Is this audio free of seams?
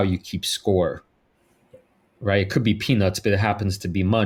yes; 0 cuts

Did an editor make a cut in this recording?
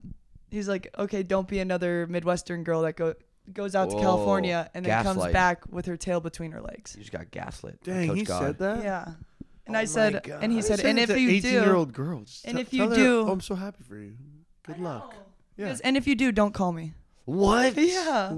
no; 0 cuts

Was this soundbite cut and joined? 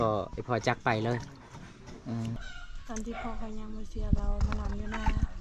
yes; 1 cut; at 2.4 s

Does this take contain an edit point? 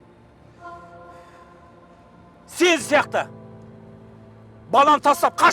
yes; 1 cut; at 2.5 s

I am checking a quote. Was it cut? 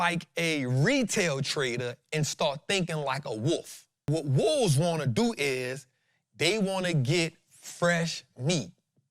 yes; 1 cut; at 4.1 s

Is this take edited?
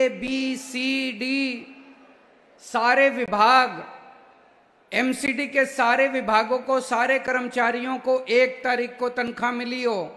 no; 0 cuts

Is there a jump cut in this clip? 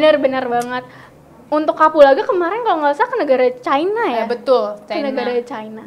no; 0 cuts

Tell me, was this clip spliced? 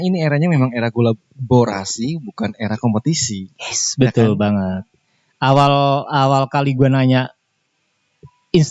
no; 0 cuts

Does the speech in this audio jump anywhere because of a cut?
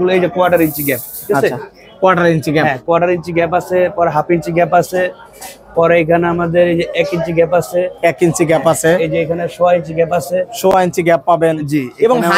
no; 0 cuts

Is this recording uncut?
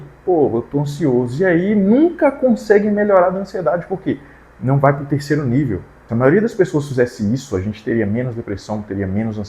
no; 1 cut; at 5.9 s

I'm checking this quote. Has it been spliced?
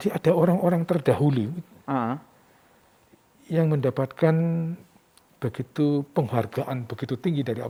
no; 0 cuts

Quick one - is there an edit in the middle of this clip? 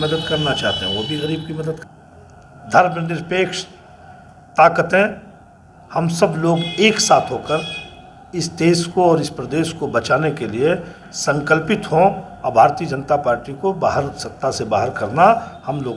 yes; 1 cut; at 1.9 s

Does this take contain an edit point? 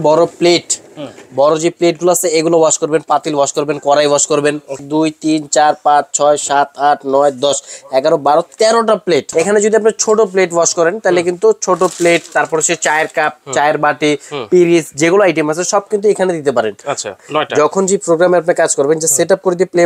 yes; 3 cuts; at 4.8 s, 9.3 s, 17.2 s

